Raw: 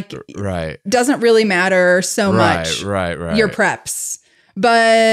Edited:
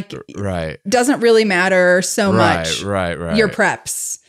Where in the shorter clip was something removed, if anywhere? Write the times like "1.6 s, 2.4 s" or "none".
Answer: none